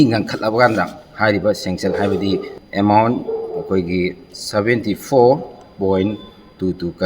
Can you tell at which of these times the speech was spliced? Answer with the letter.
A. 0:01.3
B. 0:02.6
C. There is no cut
B